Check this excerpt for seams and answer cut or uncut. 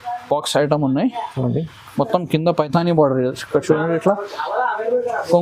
uncut